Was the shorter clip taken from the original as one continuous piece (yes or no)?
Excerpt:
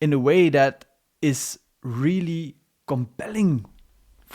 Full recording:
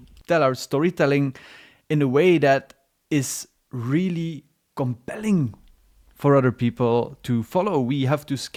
yes